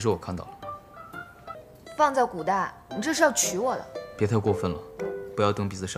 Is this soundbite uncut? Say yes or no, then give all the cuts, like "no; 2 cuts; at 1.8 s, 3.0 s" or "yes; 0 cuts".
no; 1 cut; at 1.7 s